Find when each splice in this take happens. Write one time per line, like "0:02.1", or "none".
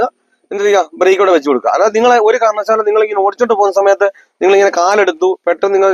none